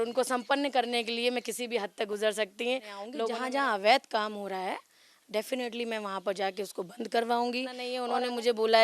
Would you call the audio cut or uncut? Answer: cut